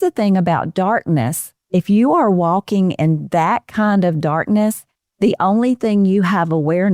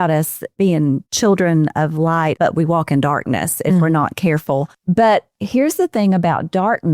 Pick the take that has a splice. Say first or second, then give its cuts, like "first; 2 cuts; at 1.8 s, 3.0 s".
second; 3 cuts; at 1.1 s, 2.3 s, 4.7 s